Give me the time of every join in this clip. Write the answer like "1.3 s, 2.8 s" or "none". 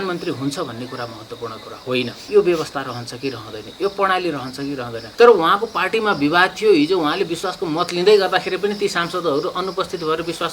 2.2 s, 5.0 s